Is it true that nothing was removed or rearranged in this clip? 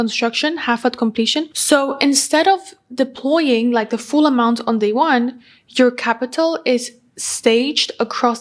no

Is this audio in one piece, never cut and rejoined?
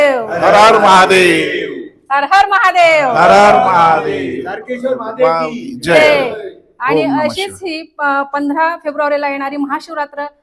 yes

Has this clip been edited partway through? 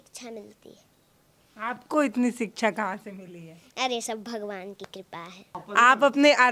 yes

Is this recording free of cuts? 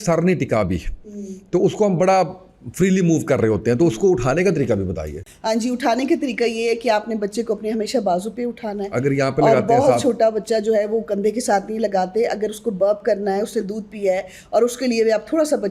yes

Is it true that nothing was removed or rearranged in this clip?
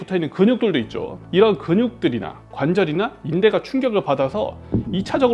yes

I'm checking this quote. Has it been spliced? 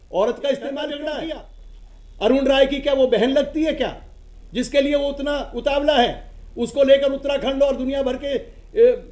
yes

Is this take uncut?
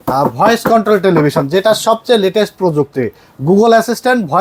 yes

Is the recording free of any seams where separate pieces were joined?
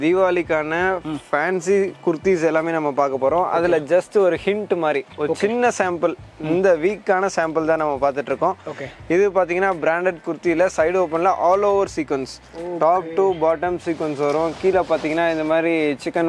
yes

